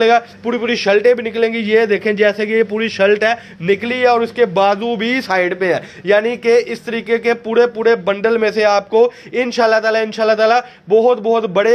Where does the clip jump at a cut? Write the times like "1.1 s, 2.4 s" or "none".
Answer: none